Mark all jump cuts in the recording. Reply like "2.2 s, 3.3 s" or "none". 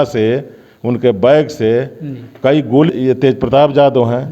2.9 s